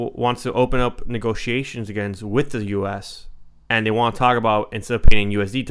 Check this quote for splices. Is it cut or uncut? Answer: uncut